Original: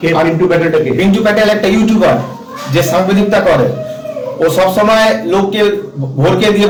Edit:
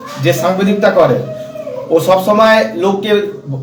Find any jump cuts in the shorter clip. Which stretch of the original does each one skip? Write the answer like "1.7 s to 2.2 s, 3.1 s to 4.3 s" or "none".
none